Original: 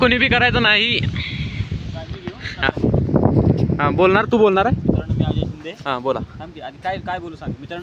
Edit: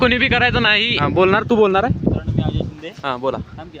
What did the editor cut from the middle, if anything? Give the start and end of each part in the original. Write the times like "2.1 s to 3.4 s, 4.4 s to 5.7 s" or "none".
1.0 s to 3.8 s